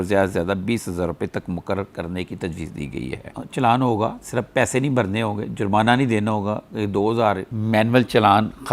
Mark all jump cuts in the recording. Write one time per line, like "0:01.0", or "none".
0:03.3
0:07.4